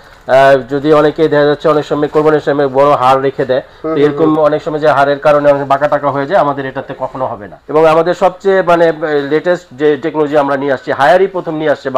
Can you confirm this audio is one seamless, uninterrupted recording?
no; 1 cut; at 7.5 s

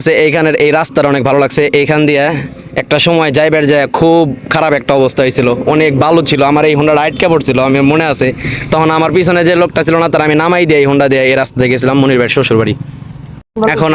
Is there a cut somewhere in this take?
no; 0 cuts

